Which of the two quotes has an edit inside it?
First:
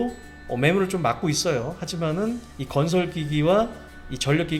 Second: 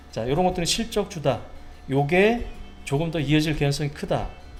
first; 1 cut; at 2.5 s

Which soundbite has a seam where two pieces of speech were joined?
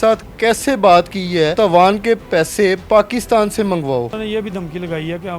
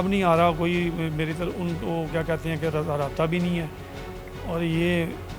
first; 2 cuts; at 1.5 s, 4.2 s

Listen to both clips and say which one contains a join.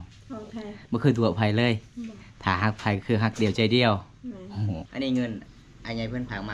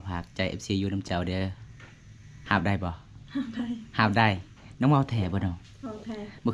first; 1 cut; at 4.8 s

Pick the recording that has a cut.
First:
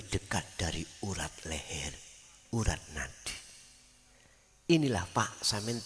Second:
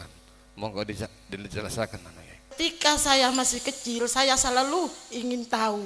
second; 1 cut; at 2.5 s

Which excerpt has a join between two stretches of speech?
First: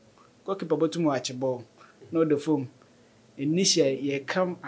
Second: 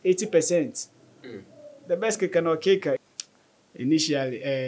second; 1 cut; at 3.0 s

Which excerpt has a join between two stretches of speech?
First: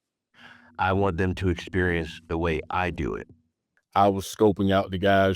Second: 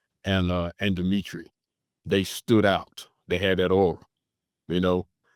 first; 1 cut; at 3.7 s

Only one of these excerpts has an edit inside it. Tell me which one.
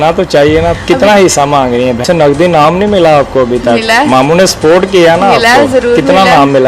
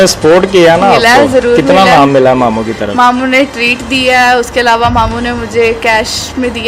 first; 1 cut; at 2.0 s

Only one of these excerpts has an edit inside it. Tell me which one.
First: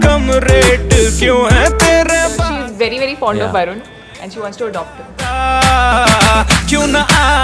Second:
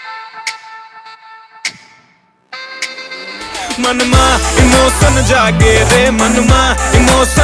first; 1 cut; at 5.8 s

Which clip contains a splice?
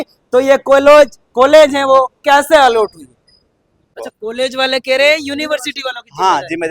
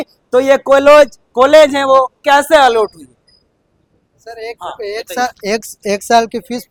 first; 1 cut; at 3.8 s

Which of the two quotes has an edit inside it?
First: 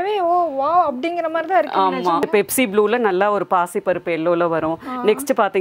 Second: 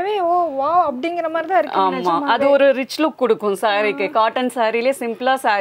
first; 1 cut; at 2.2 s

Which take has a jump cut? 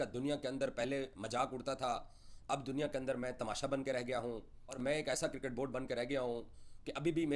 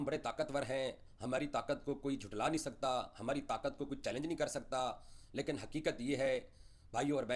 first; 1 cut; at 4.6 s

